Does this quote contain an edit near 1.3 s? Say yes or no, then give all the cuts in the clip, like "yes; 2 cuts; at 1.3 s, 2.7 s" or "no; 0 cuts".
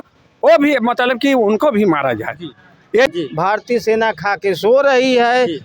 no; 1 cut; at 3.1 s